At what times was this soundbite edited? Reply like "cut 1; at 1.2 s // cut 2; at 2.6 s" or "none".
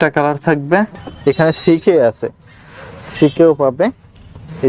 cut 1; at 0.9 s

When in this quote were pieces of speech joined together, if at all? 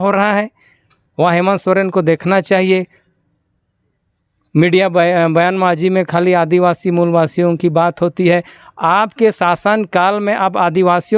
none

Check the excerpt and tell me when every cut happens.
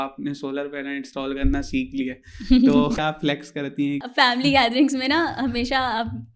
cut 1; at 3.0 s // cut 2; at 4.1 s

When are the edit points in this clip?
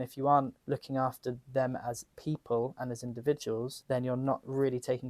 none

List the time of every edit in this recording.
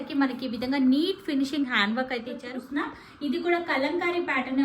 cut 1; at 2.5 s

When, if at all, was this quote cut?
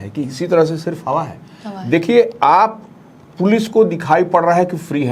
none

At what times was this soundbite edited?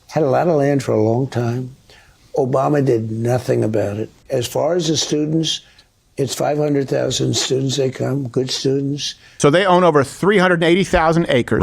cut 1; at 4.1 s // cut 2; at 9.3 s

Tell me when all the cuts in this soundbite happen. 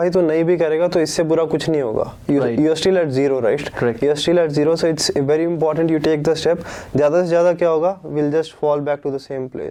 none

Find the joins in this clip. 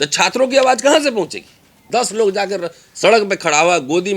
cut 1; at 1.8 s

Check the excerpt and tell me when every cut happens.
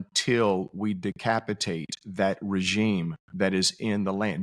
none

